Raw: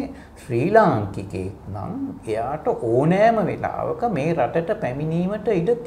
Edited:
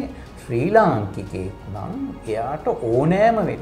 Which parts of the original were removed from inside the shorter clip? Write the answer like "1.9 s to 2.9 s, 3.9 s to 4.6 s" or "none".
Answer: none